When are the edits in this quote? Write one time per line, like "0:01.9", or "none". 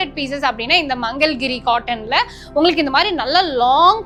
none